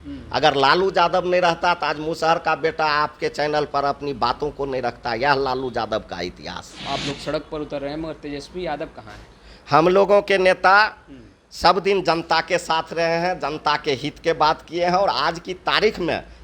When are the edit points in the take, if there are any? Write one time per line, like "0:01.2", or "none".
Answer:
0:06.7